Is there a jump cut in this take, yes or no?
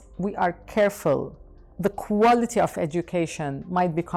no